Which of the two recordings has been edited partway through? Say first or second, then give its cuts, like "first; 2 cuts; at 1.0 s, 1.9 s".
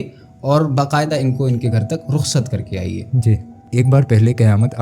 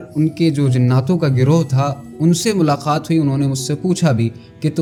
first; 1 cut; at 3.6 s